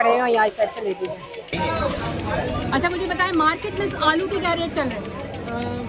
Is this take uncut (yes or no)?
no